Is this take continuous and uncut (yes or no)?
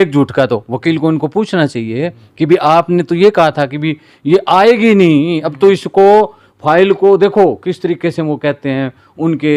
yes